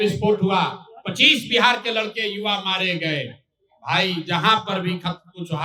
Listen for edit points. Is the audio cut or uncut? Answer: uncut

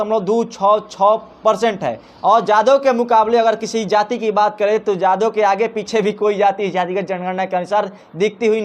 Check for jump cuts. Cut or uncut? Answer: uncut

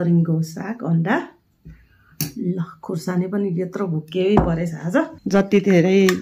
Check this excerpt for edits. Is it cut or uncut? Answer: cut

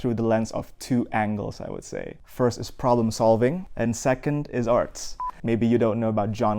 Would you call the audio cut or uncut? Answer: cut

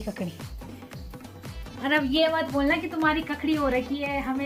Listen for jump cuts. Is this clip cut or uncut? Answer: uncut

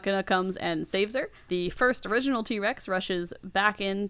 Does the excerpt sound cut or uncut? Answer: cut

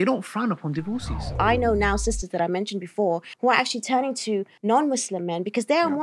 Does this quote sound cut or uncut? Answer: cut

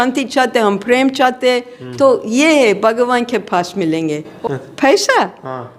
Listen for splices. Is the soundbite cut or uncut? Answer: cut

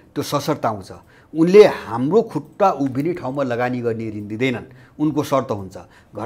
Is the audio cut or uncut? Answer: uncut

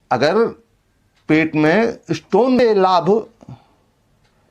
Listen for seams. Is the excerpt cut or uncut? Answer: cut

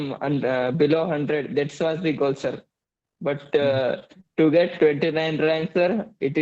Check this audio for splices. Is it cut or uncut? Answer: uncut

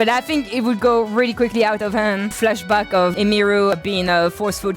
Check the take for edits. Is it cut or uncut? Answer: cut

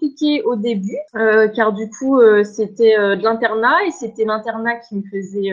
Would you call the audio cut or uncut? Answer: cut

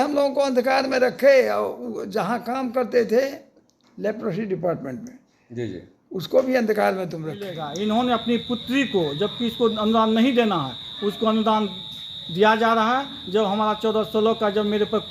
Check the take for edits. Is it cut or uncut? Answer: cut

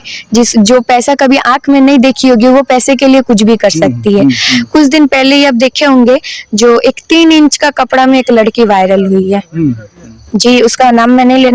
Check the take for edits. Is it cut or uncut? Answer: cut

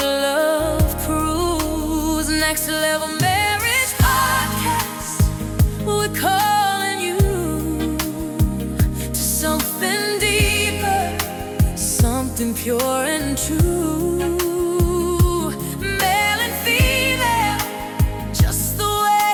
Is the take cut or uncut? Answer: uncut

